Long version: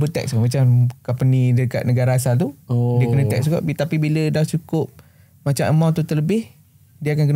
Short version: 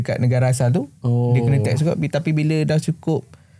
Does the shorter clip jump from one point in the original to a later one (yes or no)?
no